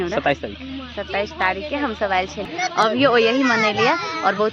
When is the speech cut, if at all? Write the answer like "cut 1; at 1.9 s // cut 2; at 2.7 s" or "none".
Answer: cut 1; at 2.5 s